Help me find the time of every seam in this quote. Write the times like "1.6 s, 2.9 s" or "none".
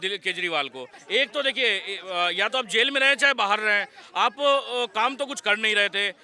1.0 s

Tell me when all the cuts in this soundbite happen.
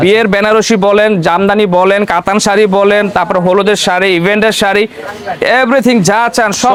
none

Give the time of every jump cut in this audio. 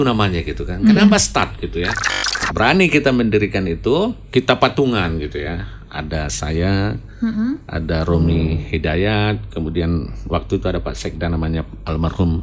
2.5 s, 4.2 s

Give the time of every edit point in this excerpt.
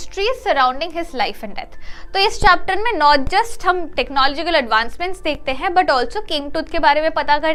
none

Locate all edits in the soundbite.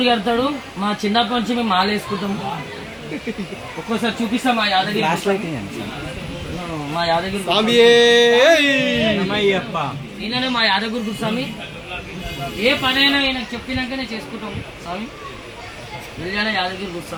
none

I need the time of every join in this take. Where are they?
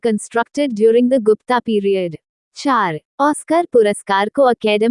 2.6 s

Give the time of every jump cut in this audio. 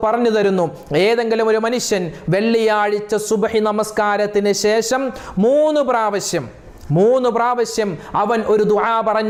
none

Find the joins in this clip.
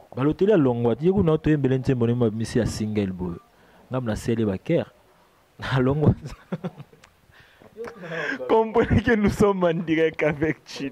none

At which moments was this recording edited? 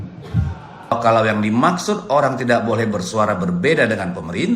1.0 s

